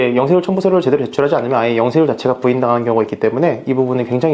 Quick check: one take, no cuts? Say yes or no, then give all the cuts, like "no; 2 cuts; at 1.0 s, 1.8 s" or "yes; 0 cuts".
yes; 0 cuts